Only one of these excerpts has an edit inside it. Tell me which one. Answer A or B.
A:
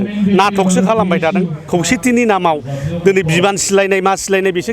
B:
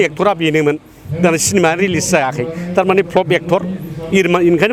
A